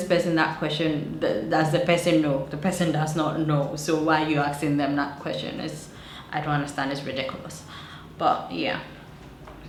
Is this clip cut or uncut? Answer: uncut